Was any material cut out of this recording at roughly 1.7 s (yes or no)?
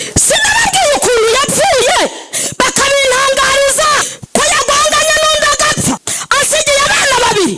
no